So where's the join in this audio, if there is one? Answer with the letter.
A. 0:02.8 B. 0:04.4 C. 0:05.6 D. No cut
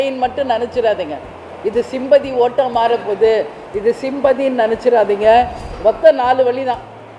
C